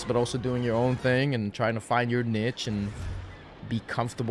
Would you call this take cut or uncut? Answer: uncut